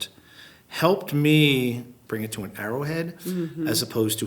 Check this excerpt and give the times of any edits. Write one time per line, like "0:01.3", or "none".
0:02.0